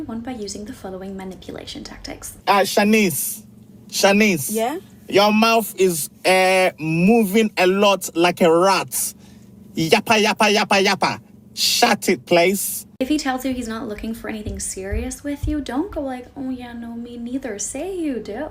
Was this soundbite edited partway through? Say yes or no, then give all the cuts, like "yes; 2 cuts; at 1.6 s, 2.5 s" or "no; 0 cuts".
no; 0 cuts